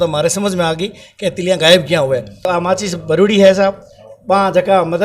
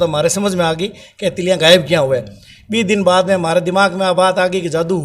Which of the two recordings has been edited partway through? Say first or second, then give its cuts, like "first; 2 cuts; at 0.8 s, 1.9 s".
first; 1 cut; at 2.4 s